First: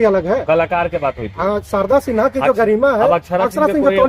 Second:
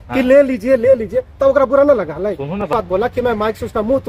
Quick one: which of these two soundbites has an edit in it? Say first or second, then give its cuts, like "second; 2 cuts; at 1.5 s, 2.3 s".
second; 1 cut; at 2.7 s